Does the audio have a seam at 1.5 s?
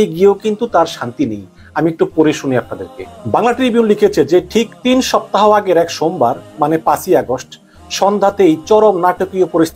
no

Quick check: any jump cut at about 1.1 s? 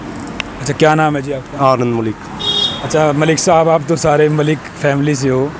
no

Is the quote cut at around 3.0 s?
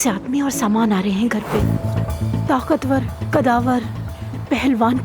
no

